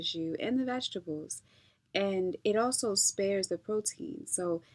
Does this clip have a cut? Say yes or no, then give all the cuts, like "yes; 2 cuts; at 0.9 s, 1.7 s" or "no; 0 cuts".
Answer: no; 0 cuts